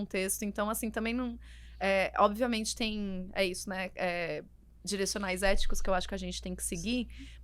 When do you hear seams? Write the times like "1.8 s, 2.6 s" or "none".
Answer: none